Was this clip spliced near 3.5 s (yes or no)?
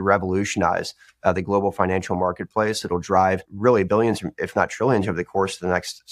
yes